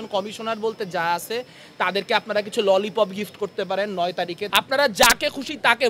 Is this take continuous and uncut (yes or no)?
no